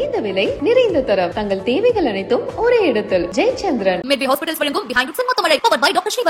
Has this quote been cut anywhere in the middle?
yes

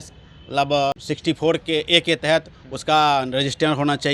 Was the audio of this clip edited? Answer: yes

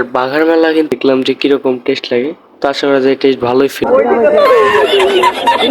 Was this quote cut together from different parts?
yes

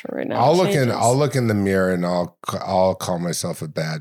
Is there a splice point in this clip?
no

